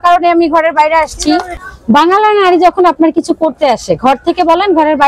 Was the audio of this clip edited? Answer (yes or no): yes